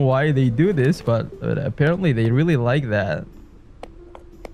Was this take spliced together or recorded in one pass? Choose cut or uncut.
uncut